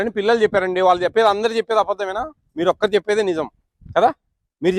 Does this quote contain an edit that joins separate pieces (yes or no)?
no